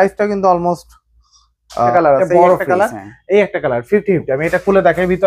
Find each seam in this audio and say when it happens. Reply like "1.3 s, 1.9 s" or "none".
1.9 s

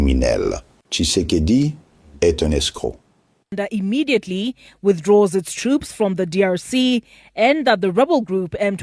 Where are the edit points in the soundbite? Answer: 3.6 s

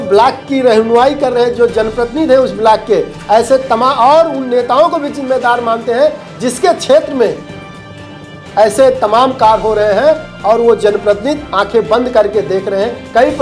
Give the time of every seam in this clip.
none

